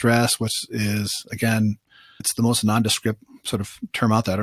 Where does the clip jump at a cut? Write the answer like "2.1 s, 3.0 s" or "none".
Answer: 2.2 s